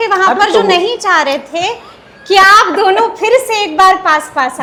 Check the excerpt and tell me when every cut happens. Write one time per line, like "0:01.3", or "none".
none